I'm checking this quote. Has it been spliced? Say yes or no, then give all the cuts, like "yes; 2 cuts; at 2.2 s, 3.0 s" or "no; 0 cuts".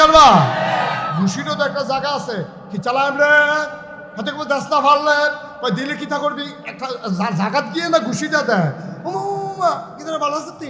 no; 0 cuts